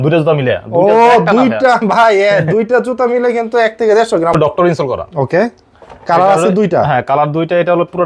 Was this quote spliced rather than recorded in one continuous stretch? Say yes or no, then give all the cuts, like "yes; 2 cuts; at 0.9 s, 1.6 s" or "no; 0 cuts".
yes; 1 cut; at 4.3 s